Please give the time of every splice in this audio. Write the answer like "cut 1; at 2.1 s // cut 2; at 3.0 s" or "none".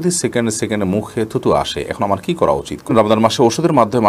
cut 1; at 2.9 s